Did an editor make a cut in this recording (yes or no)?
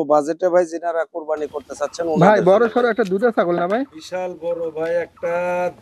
yes